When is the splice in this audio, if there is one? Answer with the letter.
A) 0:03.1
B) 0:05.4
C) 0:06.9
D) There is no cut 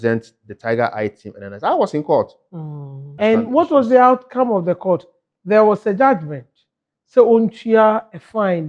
A